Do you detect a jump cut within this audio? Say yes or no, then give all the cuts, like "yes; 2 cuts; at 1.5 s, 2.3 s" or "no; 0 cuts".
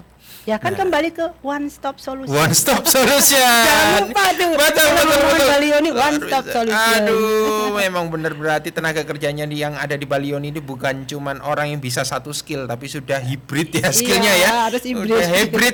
no; 0 cuts